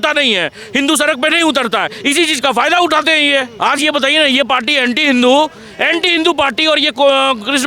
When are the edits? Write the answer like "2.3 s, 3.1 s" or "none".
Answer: 3.5 s